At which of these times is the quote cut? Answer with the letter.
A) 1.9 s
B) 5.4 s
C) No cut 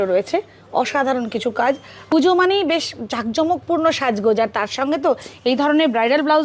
A